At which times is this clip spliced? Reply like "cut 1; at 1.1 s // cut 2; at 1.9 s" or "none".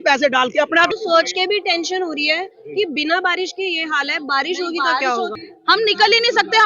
cut 1; at 0.9 s // cut 2; at 5.4 s